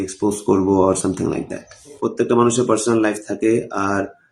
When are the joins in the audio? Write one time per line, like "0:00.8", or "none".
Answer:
0:02.0